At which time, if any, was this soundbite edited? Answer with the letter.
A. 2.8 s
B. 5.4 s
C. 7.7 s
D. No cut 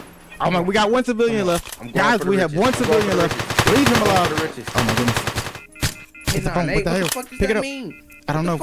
B